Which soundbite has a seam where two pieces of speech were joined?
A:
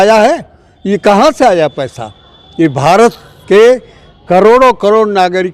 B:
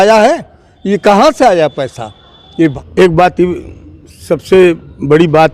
B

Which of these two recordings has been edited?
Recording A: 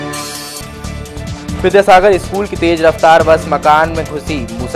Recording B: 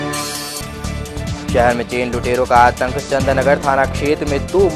A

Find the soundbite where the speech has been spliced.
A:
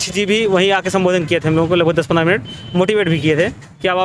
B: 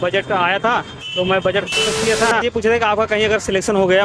B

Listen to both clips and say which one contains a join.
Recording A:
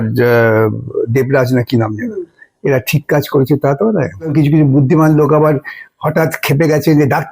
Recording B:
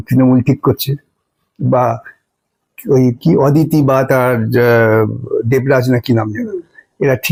A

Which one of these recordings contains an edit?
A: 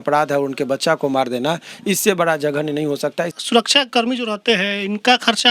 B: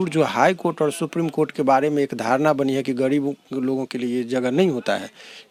A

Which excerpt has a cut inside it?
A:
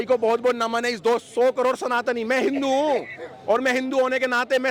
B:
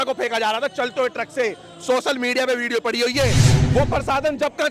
B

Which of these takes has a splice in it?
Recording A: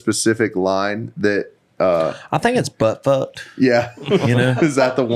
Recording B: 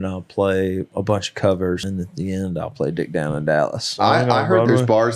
B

